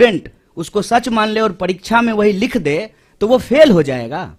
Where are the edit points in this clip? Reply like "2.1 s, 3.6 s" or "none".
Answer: none